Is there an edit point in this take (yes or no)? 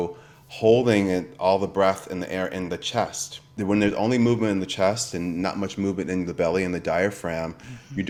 no